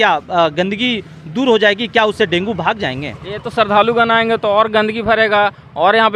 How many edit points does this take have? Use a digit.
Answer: 0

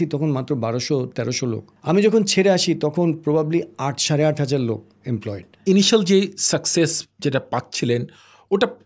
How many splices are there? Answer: 2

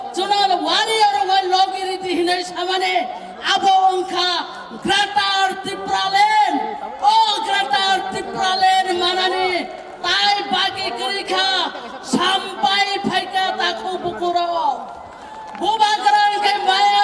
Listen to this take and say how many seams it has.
0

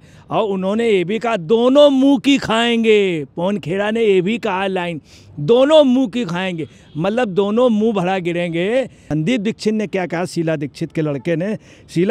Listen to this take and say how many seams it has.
1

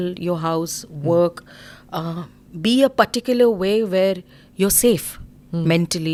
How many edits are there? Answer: 0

